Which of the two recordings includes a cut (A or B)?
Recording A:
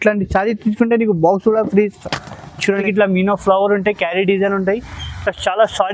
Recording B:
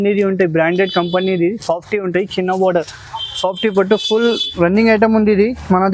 A